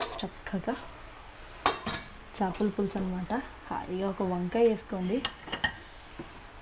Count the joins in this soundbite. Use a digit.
0